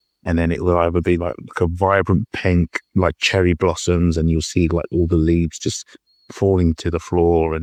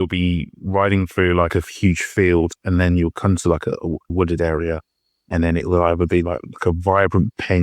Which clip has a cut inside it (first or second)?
second